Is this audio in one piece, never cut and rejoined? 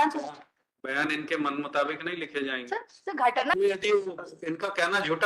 no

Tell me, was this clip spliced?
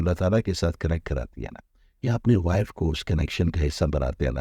no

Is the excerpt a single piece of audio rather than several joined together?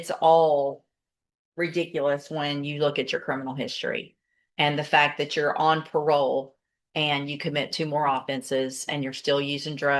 yes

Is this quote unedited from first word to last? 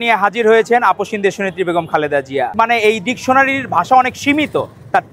no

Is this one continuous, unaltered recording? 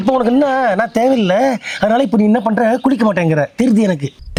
yes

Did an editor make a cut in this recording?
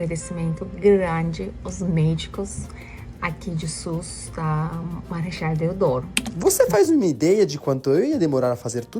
yes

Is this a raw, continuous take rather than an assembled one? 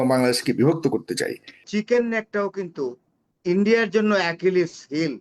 no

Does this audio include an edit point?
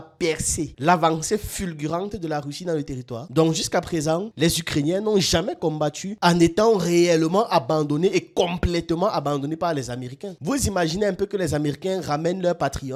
no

